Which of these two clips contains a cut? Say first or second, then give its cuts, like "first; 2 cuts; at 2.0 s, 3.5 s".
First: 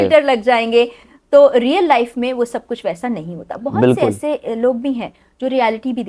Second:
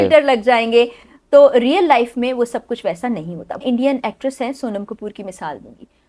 second; 1 cut; at 3.6 s